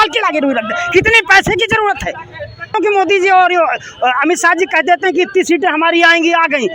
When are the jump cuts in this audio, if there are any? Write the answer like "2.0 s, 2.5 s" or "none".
2.7 s